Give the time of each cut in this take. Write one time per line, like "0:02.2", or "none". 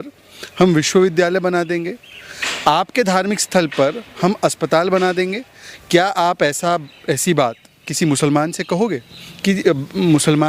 none